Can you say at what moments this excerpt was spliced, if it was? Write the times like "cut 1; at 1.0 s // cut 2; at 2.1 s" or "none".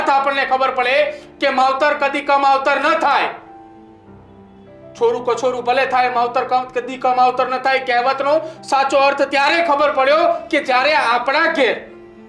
none

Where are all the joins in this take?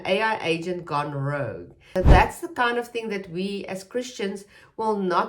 cut 1; at 1.8 s

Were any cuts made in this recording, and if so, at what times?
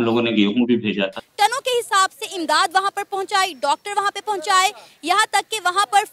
cut 1; at 1.2 s

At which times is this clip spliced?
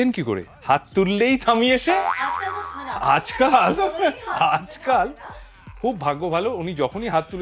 none

